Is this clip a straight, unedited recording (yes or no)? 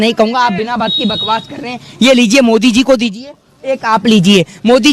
yes